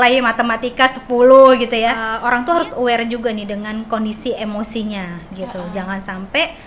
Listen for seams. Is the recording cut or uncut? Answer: cut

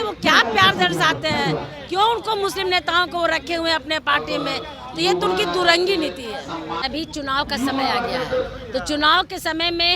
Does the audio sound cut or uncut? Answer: cut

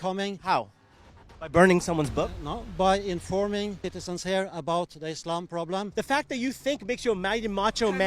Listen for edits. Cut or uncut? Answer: cut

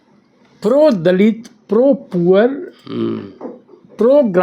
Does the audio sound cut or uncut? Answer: uncut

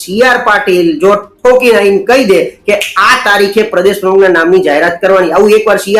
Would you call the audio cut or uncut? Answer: uncut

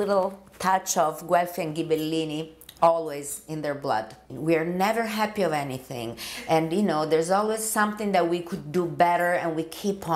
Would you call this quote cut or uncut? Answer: cut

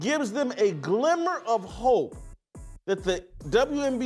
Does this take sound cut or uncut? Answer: uncut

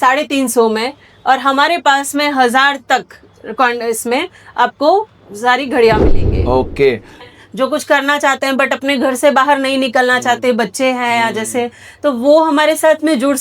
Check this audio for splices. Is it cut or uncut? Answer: cut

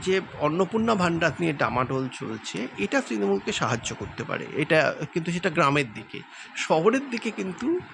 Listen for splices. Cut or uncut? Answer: uncut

